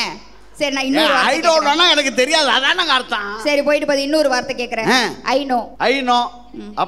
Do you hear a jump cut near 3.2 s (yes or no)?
no